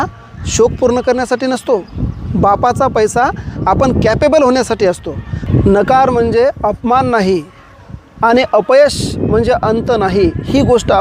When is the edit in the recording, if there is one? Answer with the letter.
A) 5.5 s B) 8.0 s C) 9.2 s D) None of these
A